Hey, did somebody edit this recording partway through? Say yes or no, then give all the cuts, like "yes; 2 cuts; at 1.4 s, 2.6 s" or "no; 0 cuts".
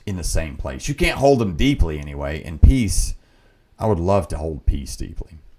no; 0 cuts